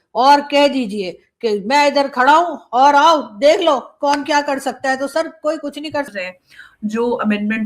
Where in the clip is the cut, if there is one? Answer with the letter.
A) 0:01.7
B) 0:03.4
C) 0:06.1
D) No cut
C